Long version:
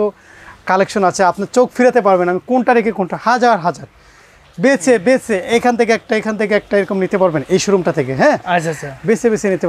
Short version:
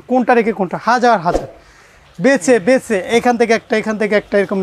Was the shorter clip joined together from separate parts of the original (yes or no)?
no